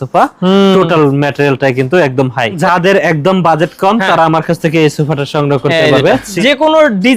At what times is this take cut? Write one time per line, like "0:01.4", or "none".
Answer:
0:02.6
0:06.3